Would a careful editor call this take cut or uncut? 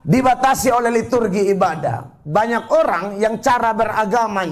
uncut